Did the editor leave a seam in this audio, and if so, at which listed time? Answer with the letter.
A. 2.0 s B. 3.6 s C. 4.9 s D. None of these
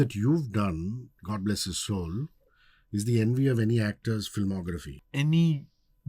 C